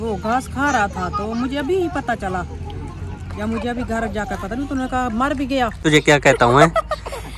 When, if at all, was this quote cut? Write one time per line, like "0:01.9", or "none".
0:05.8